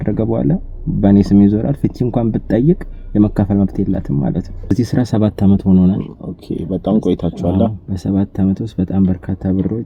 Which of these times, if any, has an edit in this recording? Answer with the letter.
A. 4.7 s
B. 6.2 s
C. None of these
A